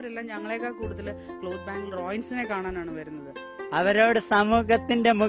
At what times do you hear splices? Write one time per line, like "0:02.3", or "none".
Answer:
0:03.6